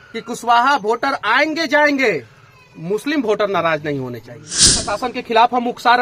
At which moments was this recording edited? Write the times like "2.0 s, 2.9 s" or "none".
4.9 s